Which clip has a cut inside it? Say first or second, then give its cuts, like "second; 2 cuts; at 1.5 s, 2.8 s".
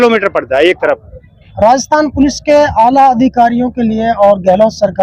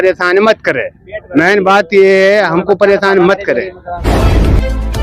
second; 1 cut; at 4.0 s